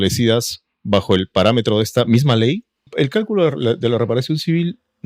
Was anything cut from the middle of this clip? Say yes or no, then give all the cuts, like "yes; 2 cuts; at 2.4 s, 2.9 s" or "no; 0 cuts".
yes; 1 cut; at 2.9 s